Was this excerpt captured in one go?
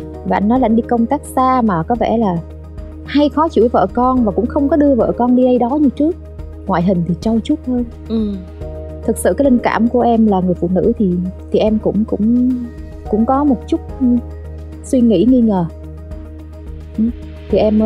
yes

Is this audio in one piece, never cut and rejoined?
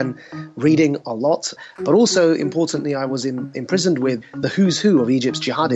no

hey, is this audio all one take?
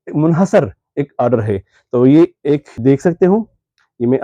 no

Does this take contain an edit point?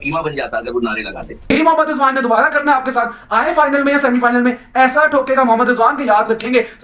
yes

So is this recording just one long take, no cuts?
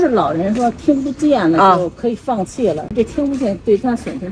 yes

